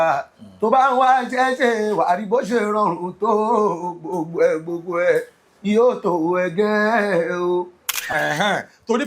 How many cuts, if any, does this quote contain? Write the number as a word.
one